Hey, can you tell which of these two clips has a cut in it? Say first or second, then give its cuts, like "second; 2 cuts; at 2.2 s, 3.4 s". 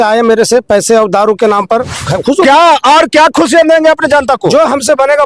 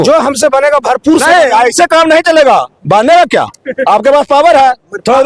first; 1 cut; at 2.1 s